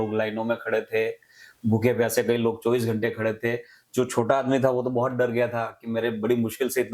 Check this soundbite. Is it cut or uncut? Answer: uncut